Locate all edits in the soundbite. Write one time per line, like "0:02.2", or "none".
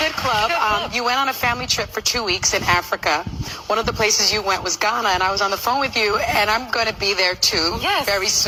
none

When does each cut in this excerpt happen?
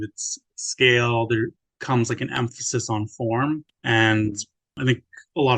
0:01.7
0:03.7
0:04.8

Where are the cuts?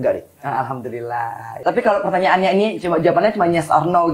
0:01.6

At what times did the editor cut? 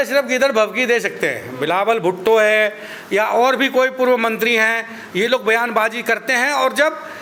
none

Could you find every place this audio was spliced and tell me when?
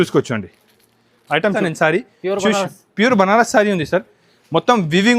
0:01.6

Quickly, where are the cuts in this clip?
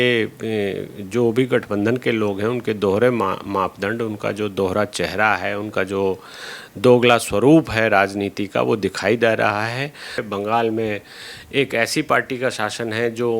0:10.2

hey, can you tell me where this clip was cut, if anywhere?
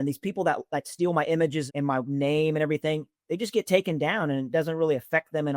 0:01.7

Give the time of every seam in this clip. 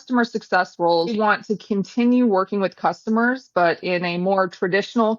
0:01.1

